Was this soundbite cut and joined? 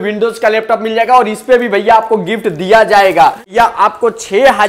yes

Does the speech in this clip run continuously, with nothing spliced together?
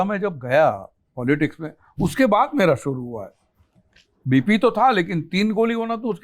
yes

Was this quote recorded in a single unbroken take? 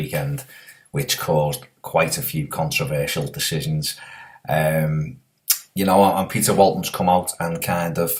yes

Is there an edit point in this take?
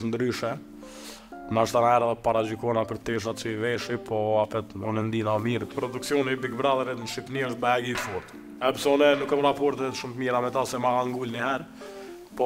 yes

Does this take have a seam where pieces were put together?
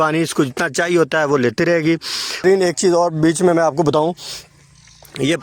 yes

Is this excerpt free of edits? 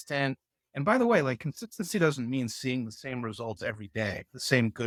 yes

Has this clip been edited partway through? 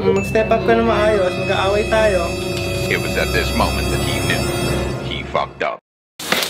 no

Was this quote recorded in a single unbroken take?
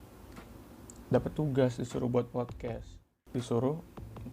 no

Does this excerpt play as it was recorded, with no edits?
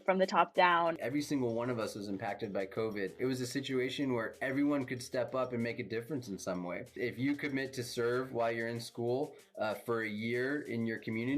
no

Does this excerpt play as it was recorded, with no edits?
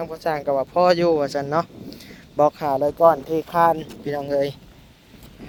yes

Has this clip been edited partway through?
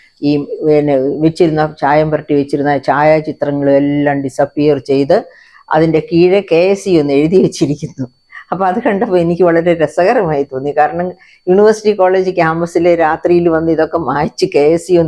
no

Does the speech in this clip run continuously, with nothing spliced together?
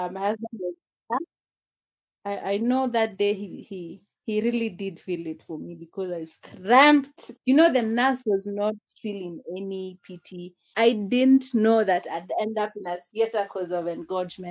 no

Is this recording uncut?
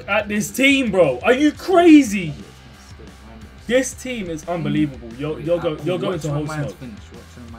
yes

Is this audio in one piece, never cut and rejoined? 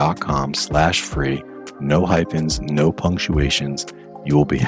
yes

